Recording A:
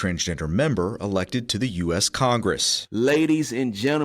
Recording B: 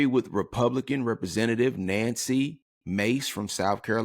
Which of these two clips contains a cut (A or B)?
A